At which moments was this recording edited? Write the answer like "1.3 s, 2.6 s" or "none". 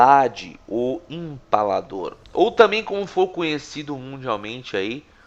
none